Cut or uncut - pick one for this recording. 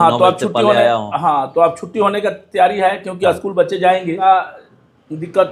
cut